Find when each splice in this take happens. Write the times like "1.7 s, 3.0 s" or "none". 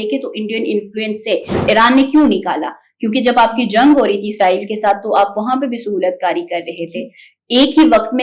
1.5 s